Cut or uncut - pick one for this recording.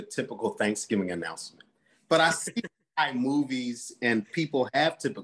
uncut